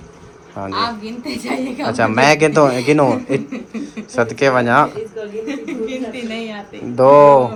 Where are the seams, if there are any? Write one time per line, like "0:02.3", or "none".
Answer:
none